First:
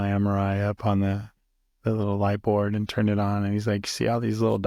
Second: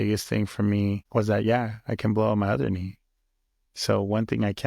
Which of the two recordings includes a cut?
second; 1 cut; at 1.0 s

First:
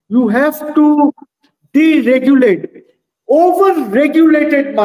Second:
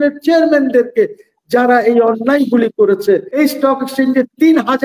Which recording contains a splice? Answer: second; 1 cut; at 3.3 s

